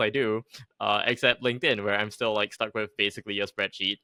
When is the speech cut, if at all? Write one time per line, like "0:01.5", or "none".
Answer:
none